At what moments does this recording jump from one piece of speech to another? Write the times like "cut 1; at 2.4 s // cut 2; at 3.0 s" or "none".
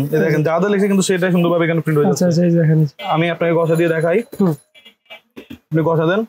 cut 1; at 3.0 s